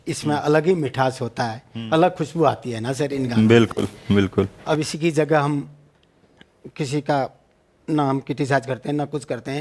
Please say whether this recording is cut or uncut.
uncut